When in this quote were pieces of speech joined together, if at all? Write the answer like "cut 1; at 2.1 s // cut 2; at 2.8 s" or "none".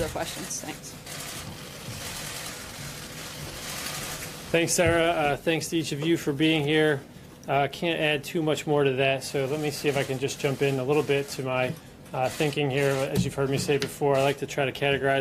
none